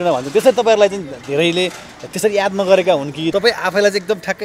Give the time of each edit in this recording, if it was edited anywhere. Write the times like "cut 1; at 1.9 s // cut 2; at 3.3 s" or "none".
cut 1; at 3.3 s